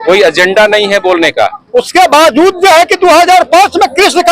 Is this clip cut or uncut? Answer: cut